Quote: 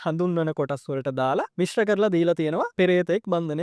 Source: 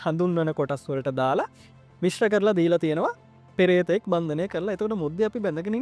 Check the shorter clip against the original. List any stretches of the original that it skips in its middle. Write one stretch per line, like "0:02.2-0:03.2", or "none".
0:01.5-0:01.9
0:03.1-0:03.5